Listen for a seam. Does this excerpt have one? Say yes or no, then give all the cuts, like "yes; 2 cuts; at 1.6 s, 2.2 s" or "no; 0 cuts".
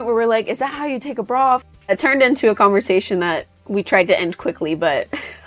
yes; 1 cut; at 1.9 s